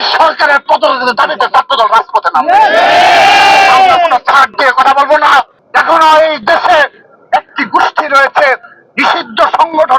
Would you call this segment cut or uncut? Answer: cut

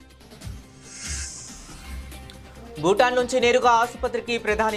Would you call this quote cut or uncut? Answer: uncut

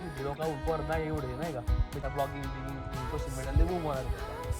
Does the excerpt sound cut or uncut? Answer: cut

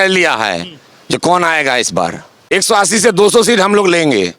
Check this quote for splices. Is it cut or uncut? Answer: cut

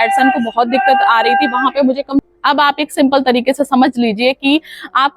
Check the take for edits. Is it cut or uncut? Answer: cut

